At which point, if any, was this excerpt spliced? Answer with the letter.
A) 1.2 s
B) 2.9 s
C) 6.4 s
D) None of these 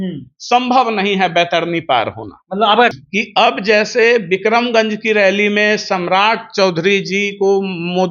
B